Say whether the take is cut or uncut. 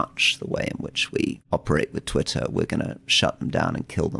cut